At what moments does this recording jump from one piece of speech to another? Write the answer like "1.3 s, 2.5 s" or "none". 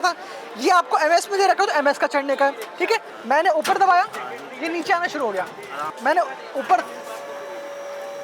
3.1 s, 5.9 s